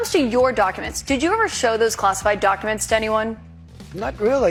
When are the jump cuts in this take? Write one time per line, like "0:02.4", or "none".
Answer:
none